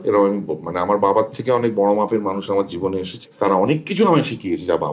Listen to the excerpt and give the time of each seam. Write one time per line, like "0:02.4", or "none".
0:03.2